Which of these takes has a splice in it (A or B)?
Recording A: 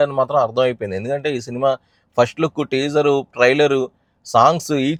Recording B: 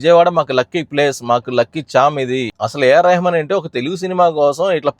B